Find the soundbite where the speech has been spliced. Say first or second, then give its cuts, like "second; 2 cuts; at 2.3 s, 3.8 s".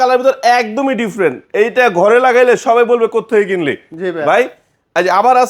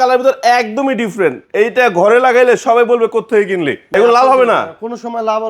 second; 1 cut; at 3.9 s